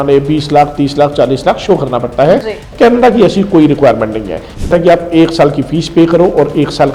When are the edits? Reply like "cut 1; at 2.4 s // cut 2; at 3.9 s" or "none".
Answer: cut 1; at 4.7 s